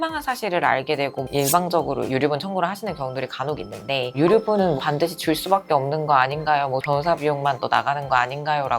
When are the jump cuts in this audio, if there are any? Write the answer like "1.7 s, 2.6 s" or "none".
1.3 s, 4.1 s, 6.8 s